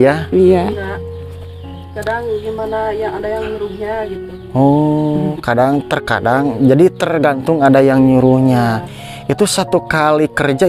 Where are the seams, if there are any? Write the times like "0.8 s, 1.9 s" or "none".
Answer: none